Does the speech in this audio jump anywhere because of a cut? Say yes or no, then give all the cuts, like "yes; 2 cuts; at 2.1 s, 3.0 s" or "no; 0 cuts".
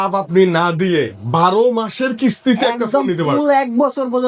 no; 0 cuts